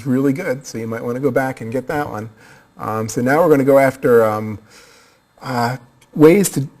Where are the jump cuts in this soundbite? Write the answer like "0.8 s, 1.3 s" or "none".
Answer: 4.5 s